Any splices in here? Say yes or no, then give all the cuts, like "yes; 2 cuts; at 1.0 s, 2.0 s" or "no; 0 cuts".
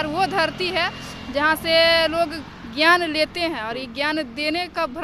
no; 0 cuts